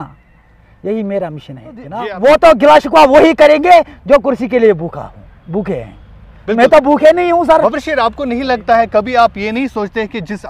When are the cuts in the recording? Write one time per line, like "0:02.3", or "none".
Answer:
0:01.9